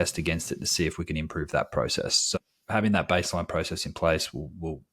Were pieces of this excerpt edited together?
yes; 1 cut; at 2.3 s

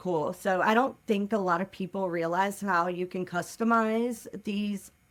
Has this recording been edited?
no; 0 cuts

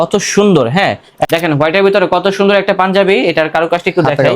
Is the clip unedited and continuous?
no; 1 cut; at 1.2 s

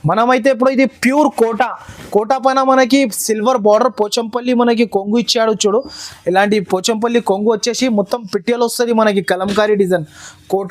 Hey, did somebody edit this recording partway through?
no; 0 cuts

